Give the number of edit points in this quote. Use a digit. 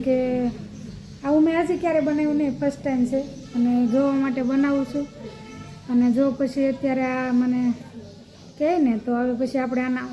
0